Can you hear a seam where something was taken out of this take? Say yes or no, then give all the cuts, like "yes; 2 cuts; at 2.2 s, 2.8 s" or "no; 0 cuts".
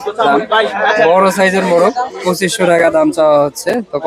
no; 0 cuts